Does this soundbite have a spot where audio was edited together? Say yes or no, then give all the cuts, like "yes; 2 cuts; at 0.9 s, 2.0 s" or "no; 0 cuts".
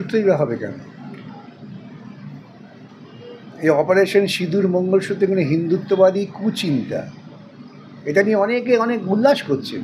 no; 0 cuts